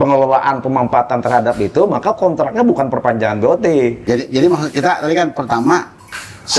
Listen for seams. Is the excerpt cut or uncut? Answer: cut